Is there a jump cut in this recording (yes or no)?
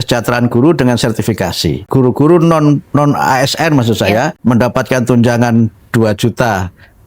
yes